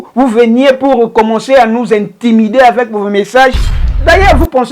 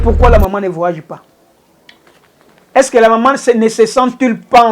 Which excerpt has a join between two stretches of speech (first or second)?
first